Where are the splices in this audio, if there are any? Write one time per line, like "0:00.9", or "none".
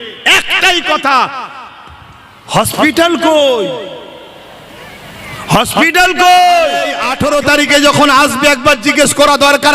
0:07.0